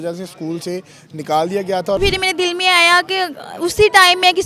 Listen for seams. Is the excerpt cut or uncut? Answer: cut